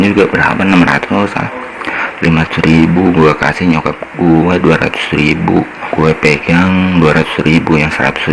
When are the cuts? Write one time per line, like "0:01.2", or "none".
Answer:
0:05.8